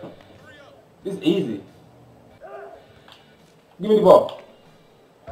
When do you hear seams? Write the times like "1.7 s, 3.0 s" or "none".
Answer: 2.3 s